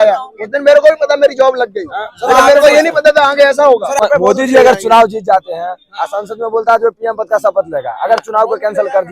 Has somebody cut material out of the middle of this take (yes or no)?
yes